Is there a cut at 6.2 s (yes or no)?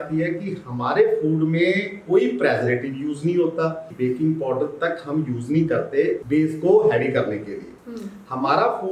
yes